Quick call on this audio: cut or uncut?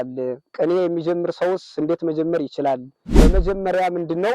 cut